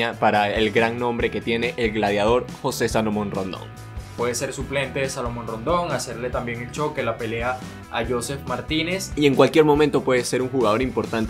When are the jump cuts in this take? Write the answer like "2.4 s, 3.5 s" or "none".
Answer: 4.0 s, 9.0 s